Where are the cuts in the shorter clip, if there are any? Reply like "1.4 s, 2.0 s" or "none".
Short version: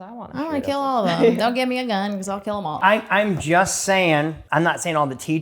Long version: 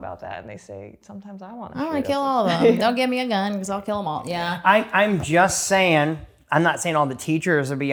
2.8 s, 4.4 s